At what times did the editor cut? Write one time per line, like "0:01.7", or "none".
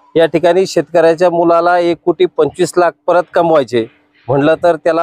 none